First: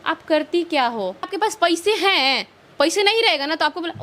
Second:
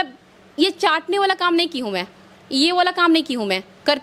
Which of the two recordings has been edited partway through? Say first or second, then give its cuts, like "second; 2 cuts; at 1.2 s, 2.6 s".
first; 1 cut; at 1.3 s